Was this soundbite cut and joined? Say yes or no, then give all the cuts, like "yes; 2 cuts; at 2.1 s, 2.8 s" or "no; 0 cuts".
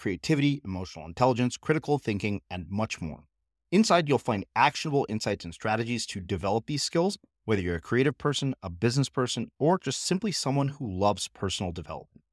no; 0 cuts